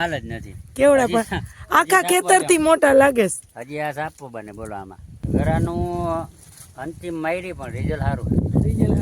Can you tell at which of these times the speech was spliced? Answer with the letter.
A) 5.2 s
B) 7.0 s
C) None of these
A